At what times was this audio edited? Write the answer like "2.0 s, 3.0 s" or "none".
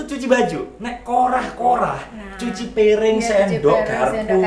none